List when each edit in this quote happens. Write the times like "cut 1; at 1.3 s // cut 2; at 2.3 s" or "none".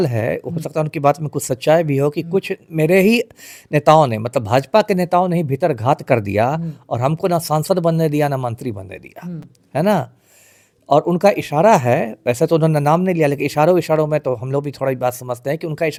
none

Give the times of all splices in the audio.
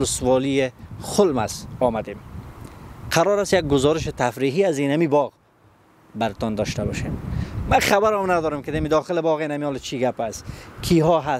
none

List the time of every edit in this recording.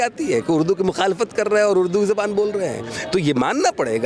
none

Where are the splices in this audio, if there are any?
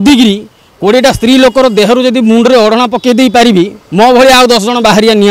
none

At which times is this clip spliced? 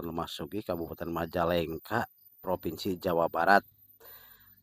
none

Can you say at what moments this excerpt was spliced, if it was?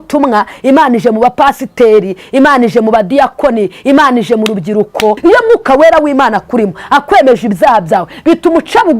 cut 1; at 5.2 s

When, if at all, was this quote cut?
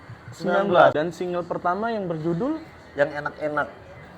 cut 1; at 0.9 s

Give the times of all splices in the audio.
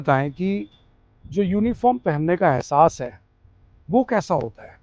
none

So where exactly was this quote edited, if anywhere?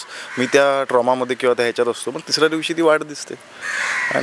none

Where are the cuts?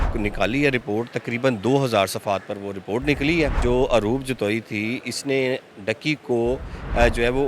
cut 1; at 3.6 s

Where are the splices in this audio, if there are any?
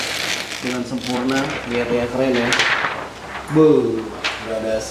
none

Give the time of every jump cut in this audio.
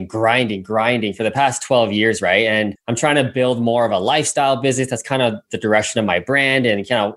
cut 1; at 2.8 s

